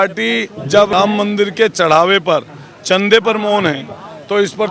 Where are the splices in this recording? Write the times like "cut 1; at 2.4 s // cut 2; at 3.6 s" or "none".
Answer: cut 1; at 0.9 s